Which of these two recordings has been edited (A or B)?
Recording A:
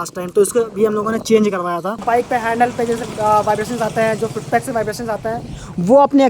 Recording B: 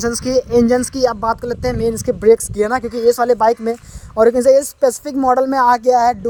A